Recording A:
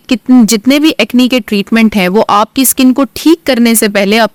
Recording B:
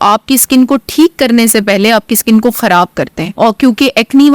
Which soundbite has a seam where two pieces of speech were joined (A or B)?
B